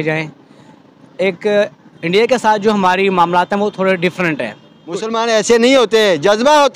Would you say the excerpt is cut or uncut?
cut